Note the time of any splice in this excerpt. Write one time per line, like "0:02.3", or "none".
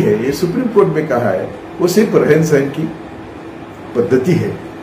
none